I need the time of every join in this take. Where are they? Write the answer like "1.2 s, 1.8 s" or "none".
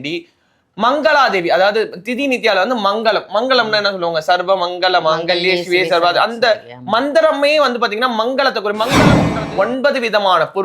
9.3 s